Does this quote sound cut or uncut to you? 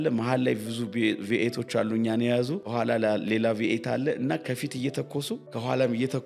cut